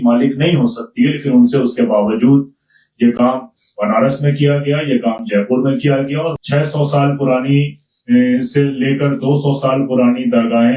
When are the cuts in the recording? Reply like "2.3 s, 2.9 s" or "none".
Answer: 6.3 s